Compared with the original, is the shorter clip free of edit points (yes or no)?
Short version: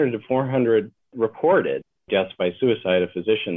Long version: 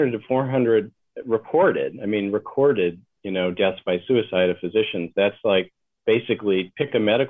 no